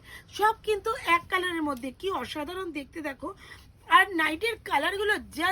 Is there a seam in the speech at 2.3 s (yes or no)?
no